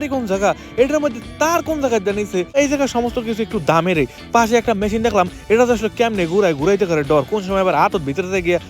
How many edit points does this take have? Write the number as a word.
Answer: one